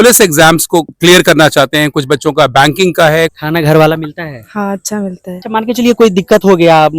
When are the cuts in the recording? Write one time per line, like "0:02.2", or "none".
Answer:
0:00.9
0:03.4
0:05.4